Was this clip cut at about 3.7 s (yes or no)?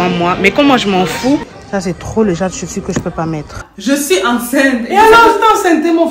yes